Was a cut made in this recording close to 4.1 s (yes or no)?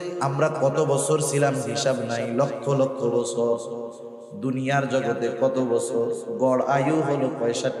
no